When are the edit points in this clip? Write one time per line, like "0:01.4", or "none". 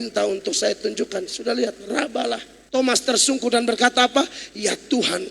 0:02.5